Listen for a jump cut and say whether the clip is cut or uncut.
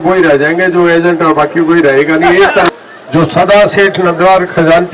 cut